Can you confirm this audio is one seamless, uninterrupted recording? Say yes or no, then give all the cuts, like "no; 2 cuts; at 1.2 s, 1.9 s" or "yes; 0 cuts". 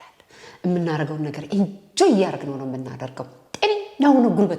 yes; 0 cuts